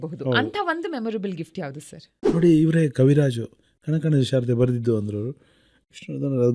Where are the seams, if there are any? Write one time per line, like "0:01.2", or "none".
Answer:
0:02.1